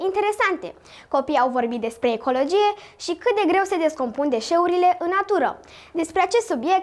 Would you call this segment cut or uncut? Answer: uncut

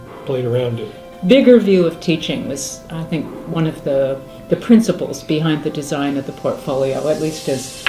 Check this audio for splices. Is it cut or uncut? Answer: cut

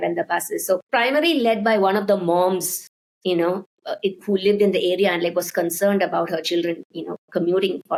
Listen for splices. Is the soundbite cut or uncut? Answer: uncut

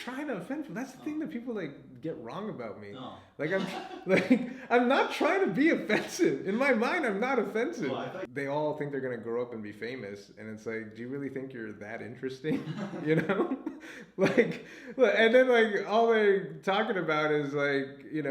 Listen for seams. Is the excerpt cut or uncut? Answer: cut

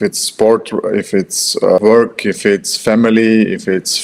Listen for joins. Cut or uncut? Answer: cut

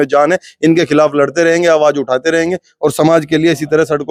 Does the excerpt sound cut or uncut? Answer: uncut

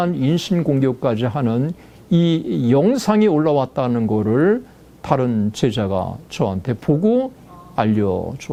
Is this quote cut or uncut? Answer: uncut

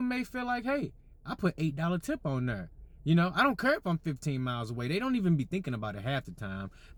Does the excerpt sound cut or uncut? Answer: uncut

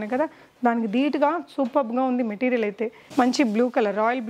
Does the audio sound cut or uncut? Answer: cut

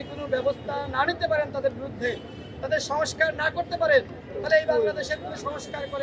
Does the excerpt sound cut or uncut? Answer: uncut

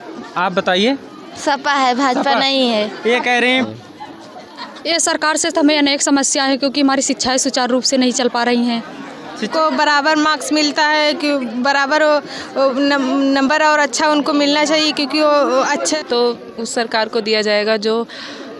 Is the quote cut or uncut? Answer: cut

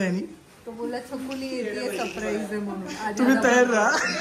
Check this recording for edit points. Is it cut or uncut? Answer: uncut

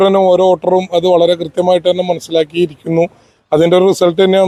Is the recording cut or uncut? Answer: uncut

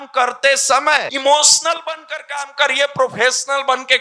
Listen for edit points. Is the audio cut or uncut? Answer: cut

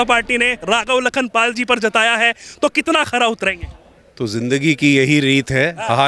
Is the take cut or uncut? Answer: uncut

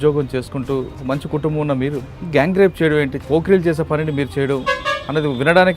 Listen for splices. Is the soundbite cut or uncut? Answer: cut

